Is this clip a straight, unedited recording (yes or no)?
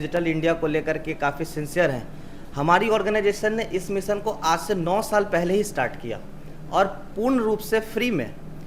yes